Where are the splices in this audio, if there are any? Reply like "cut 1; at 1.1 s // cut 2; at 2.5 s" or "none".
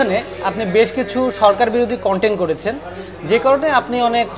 none

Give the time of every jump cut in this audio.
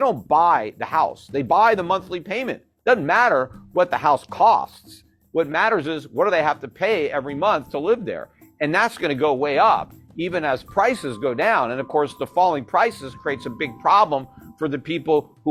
none

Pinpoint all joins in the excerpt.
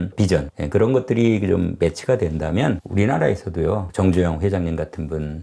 none

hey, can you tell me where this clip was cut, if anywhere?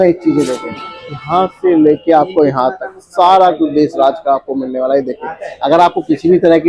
none

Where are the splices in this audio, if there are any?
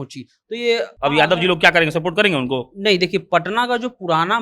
cut 1; at 0.9 s

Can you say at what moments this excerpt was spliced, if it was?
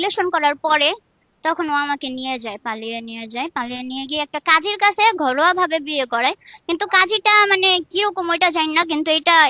none

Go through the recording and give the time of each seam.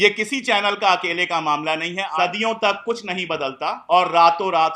cut 1; at 2.1 s // cut 2; at 3.8 s

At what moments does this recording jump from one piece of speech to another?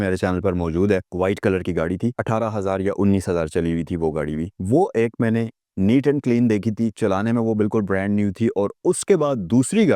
none

